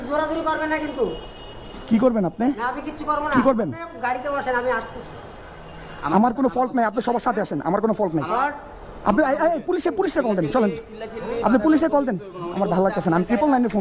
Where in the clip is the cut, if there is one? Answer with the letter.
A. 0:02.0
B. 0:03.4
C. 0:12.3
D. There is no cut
D